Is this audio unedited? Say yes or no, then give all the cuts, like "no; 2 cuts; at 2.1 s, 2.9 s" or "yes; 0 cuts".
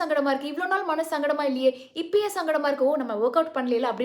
yes; 0 cuts